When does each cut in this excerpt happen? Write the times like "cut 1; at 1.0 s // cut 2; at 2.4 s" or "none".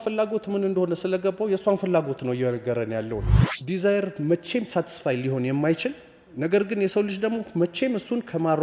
cut 1; at 3.3 s